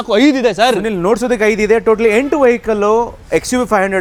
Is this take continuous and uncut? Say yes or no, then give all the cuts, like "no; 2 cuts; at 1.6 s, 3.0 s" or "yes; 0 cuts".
yes; 0 cuts